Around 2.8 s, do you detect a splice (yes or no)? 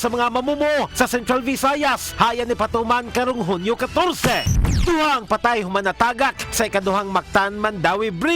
no